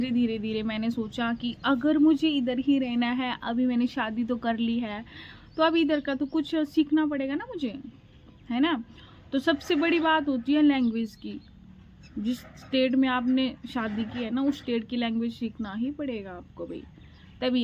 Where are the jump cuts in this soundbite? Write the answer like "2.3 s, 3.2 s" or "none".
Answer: none